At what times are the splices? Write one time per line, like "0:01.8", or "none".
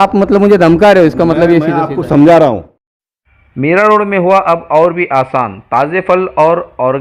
0:03.0